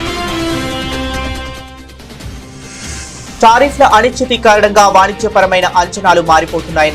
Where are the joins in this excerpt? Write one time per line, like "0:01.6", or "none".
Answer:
none